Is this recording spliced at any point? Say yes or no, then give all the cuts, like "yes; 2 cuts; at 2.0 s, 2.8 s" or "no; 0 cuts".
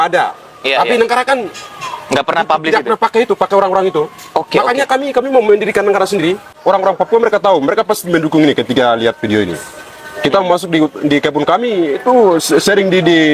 yes; 1 cut; at 6.6 s